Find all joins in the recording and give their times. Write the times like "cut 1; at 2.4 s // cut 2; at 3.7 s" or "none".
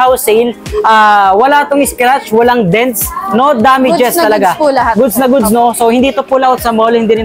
none